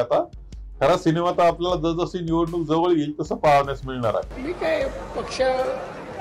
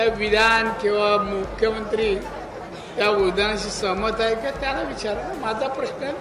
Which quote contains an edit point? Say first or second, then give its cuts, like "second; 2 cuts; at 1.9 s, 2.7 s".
first; 1 cut; at 4.4 s